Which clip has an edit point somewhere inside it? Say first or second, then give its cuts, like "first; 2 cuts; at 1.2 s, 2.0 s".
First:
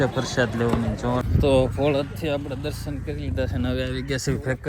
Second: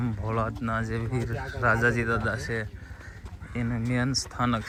first; 1 cut; at 1.3 s